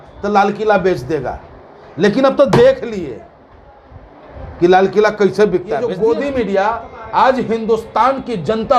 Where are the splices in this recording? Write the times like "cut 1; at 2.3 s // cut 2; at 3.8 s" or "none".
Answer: cut 1; at 5.8 s